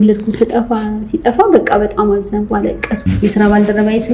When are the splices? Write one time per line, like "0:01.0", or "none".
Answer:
0:03.1